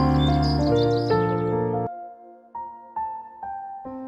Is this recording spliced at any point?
no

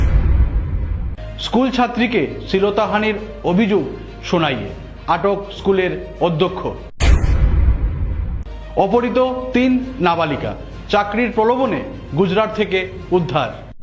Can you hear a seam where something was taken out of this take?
yes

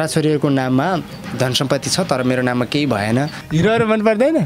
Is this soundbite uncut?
no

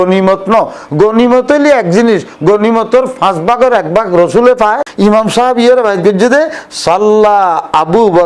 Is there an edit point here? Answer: yes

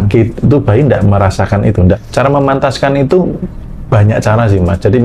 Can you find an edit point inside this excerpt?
yes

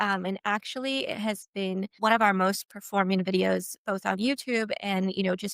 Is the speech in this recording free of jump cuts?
no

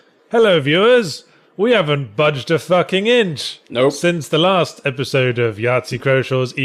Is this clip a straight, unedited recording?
yes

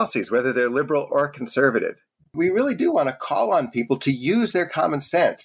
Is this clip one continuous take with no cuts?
no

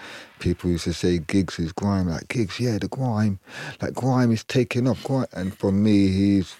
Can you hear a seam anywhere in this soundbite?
no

